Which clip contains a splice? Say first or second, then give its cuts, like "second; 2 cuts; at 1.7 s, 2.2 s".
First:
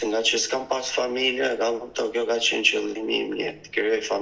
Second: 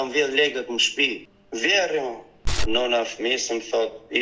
second; 2 cuts; at 1.2 s, 2.6 s